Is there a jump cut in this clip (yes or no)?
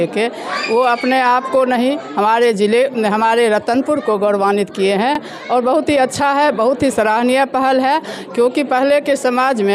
no